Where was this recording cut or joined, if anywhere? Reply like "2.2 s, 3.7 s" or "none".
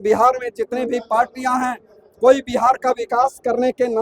none